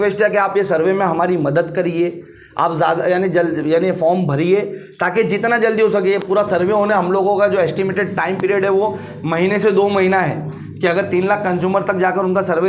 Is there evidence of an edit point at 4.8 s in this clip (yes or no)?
no